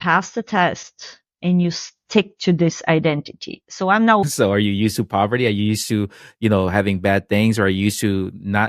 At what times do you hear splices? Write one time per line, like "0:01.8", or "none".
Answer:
0:04.2

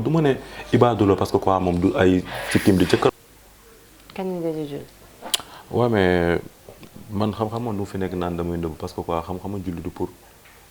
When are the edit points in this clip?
0:03.1

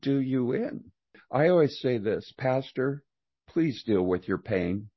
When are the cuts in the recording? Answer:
0:01.2

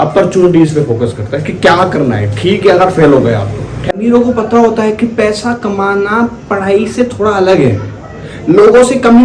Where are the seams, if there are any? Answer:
0:03.9

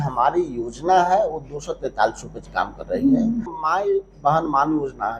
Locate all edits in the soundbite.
0:03.5

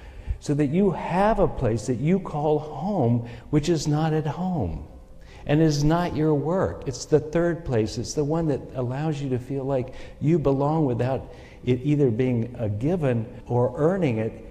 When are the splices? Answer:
0:13.3

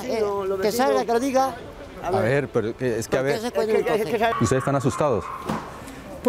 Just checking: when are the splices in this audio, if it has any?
0:04.3

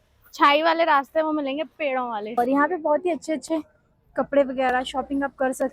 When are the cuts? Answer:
0:02.4

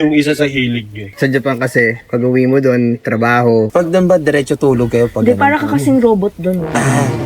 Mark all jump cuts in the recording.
0:01.0
0:03.7

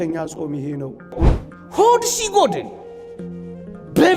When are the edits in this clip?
0:01.3

